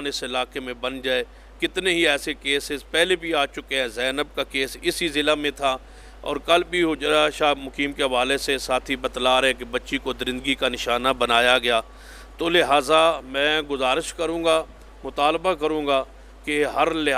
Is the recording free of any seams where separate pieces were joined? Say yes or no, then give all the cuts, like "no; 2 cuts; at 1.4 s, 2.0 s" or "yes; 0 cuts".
yes; 0 cuts